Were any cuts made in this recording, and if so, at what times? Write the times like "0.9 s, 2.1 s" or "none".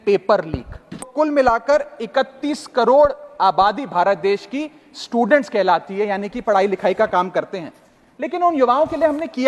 1.1 s